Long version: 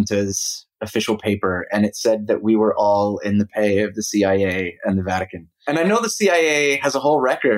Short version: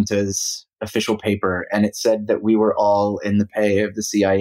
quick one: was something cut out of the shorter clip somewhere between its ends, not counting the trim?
no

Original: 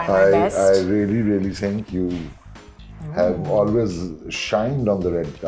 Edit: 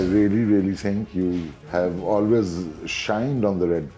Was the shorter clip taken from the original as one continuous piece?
no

